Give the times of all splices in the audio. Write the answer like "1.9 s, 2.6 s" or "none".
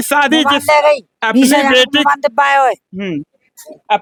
none